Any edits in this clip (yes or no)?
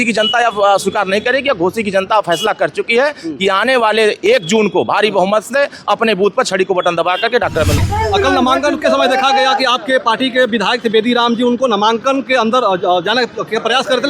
yes